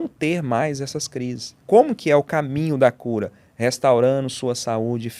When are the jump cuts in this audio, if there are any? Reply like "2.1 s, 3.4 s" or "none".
1.5 s